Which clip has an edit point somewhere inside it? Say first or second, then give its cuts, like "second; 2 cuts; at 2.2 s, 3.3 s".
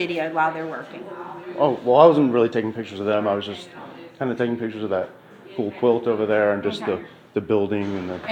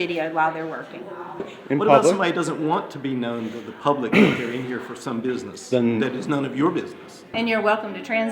second; 2 cuts; at 1.5 s, 7.3 s